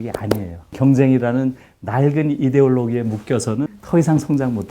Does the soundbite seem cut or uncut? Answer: cut